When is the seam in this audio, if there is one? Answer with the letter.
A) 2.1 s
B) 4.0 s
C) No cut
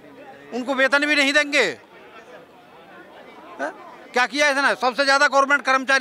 C